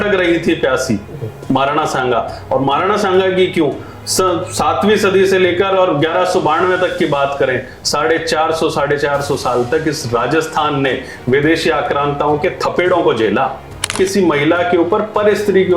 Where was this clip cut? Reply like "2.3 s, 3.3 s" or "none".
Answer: 13.9 s